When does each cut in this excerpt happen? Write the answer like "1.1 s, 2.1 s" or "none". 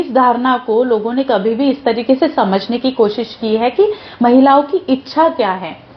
none